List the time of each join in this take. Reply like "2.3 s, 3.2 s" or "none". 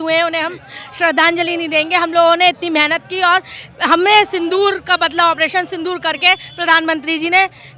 none